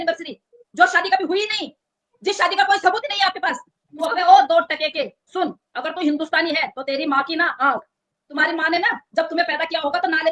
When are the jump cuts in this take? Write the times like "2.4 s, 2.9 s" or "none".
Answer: 3.9 s, 8.2 s